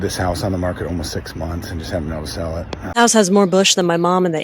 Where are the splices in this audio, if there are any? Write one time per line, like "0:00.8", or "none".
0:02.8